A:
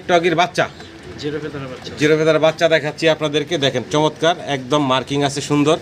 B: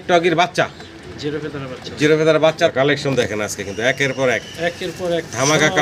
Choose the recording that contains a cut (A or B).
B